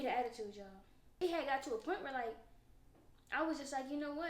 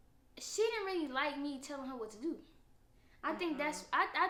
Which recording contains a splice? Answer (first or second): first